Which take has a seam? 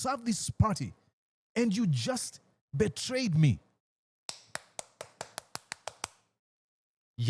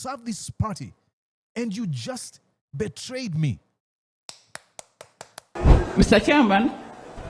second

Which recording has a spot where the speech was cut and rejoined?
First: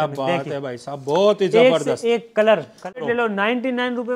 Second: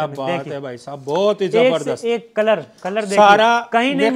first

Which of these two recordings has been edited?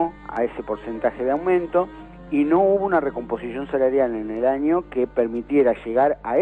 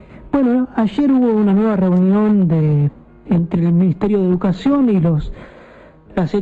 second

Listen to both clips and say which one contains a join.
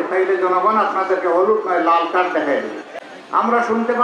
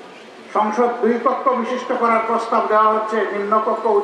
first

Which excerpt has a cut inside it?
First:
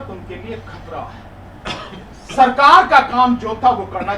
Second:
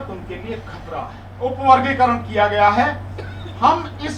second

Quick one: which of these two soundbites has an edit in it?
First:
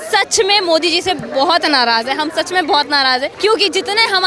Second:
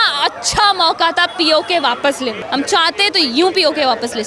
first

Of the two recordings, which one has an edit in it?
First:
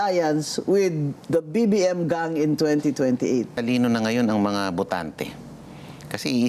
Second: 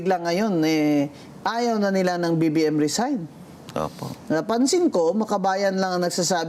first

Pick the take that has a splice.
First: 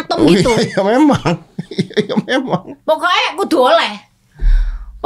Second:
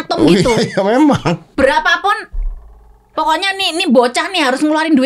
second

